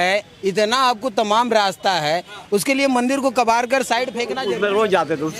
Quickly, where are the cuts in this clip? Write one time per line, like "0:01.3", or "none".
0:04.4